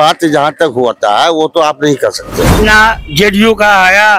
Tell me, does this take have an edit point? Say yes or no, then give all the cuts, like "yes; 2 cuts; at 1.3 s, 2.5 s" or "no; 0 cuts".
yes; 1 cut; at 2.5 s